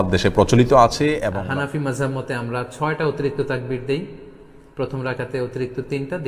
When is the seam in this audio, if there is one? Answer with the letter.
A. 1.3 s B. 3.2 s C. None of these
A